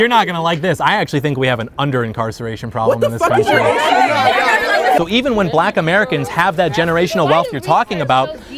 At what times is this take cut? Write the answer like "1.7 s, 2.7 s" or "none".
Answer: 5.0 s